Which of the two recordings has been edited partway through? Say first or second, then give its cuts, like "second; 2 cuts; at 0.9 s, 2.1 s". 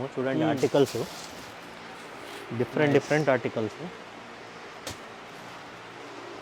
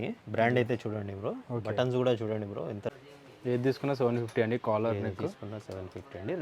second; 1 cut; at 3.0 s